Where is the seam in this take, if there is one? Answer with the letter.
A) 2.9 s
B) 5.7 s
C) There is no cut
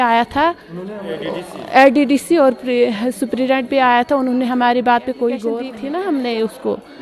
B